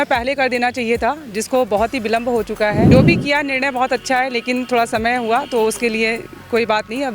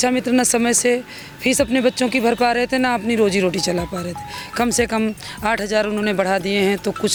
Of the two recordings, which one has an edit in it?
first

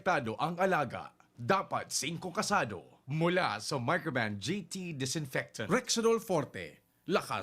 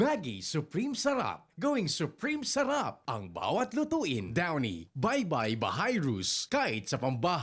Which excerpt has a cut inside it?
first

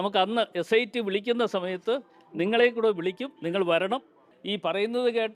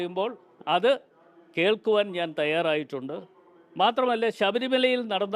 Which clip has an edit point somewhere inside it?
first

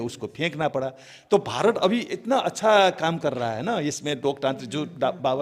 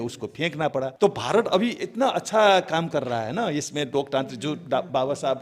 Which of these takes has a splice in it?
second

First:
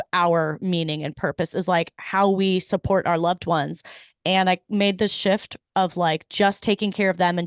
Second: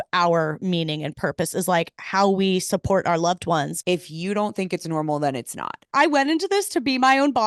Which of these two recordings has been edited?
second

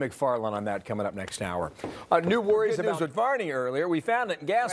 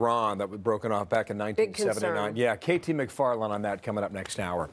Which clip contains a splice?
first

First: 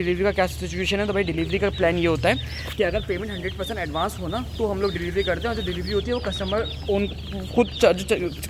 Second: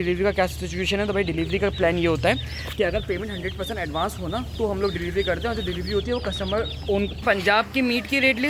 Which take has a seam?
second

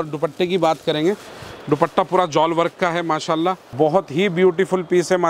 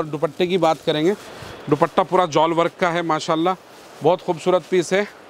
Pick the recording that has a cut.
first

